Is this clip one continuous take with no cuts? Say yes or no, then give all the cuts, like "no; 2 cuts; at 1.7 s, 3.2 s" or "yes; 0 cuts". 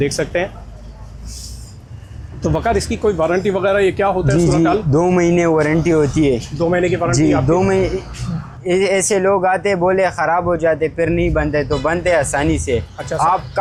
yes; 0 cuts